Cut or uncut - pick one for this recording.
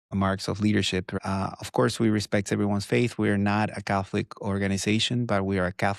cut